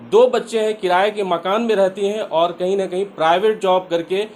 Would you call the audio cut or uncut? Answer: uncut